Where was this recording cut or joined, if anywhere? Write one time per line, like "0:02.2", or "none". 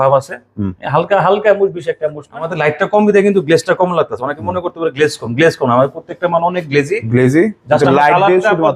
0:02.5